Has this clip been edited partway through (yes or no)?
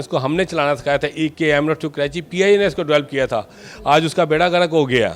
no